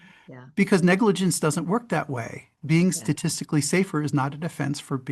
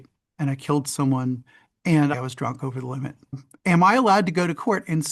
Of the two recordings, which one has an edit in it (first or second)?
second